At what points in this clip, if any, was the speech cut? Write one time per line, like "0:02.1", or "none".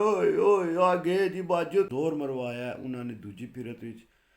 0:01.9